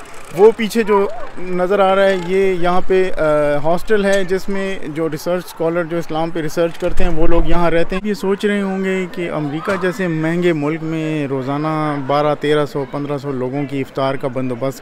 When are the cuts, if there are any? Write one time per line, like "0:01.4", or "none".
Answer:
0:08.0